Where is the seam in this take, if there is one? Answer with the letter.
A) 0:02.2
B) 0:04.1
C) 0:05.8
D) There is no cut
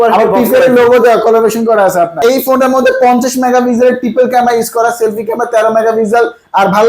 A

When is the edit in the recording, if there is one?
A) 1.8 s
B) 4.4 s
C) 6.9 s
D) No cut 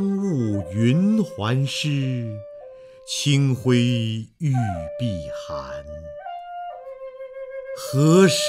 D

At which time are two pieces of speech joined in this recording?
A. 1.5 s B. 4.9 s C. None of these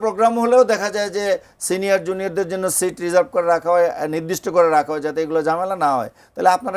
C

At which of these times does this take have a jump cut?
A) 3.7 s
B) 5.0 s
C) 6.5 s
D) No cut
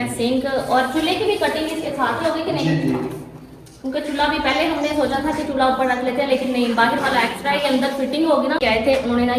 D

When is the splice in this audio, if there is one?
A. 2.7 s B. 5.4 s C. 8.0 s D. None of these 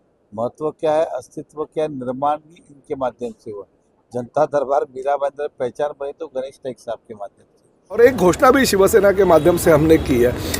C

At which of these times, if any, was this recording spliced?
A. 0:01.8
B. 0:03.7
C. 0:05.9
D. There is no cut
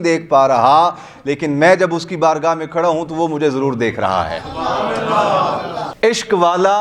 C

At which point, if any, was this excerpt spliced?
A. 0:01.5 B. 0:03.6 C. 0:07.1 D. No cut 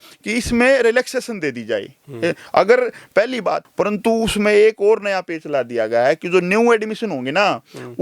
B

